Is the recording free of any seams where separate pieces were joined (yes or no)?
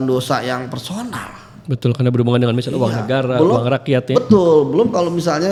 yes